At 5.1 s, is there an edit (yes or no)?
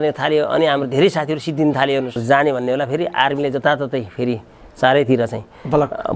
no